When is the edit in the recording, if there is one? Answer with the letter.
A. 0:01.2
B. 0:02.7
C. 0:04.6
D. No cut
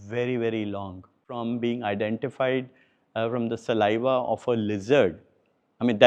A